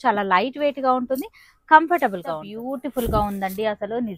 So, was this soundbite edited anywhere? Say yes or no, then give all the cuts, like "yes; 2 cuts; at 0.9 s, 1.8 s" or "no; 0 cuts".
yes; 1 cut; at 2.5 s